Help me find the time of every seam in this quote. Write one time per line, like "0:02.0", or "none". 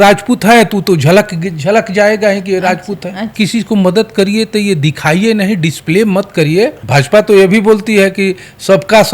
0:03.3
0:06.8